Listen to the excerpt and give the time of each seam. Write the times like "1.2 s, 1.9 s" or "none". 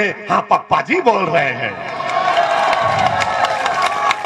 none